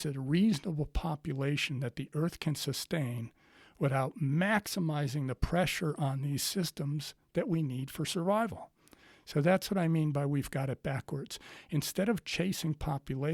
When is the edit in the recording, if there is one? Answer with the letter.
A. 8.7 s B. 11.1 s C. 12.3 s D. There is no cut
D